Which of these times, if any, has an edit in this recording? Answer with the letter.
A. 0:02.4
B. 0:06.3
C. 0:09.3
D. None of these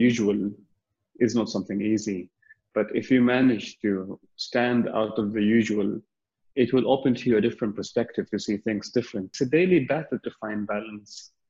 C